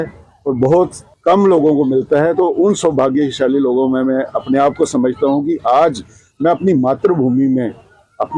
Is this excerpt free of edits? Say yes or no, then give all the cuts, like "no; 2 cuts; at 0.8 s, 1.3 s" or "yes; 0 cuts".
no; 1 cut; at 1.1 s